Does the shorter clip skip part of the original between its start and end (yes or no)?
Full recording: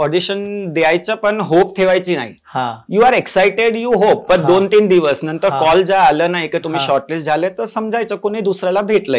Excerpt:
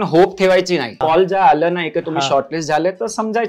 yes